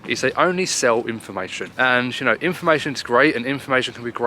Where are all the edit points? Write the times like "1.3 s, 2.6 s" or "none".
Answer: 1.6 s